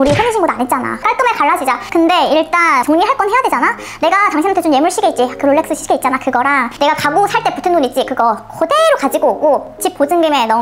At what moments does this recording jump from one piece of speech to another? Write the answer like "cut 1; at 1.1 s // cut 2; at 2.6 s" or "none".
none